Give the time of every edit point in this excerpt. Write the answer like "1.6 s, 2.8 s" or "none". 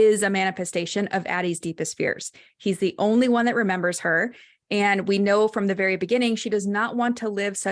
none